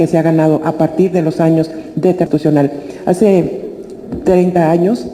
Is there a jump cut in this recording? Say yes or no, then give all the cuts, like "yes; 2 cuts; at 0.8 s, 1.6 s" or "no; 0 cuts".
yes; 1 cut; at 2.3 s